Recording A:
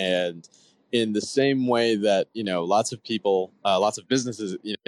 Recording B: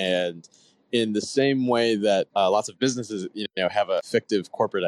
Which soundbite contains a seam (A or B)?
B